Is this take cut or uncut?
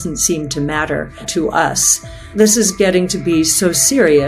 cut